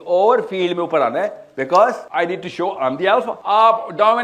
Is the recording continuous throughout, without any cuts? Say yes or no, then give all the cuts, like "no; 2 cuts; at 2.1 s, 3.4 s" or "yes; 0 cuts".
no; 2 cuts; at 2.0 s, 3.4 s